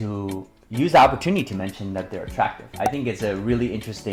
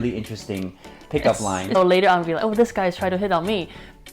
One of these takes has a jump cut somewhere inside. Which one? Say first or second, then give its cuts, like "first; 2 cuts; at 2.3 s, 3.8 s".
second; 1 cut; at 1.8 s